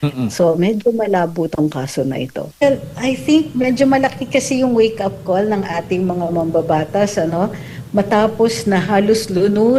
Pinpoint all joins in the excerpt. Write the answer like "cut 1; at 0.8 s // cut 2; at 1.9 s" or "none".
cut 1; at 2.6 s